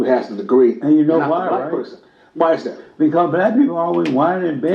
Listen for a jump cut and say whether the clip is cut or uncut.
uncut